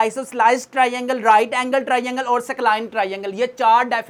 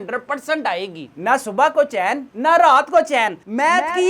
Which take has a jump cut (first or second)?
second